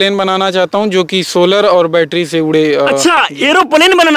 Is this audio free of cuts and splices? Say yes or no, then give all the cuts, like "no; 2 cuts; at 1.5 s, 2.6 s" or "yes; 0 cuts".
yes; 0 cuts